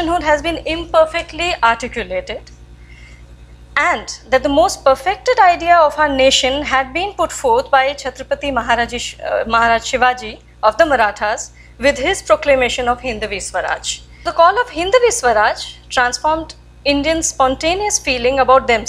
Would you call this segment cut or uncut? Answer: cut